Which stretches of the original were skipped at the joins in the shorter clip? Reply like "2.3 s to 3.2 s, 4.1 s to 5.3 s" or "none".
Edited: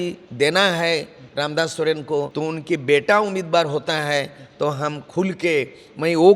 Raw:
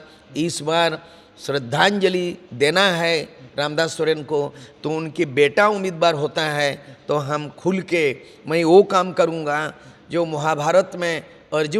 4.5 s to 4.8 s